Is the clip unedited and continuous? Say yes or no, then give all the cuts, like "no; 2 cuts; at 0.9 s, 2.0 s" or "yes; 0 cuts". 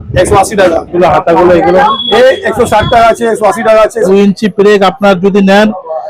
no; 2 cuts; at 0.9 s, 4.1 s